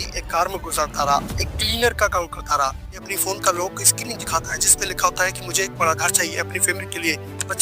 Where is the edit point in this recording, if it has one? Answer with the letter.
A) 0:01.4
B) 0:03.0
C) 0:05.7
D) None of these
B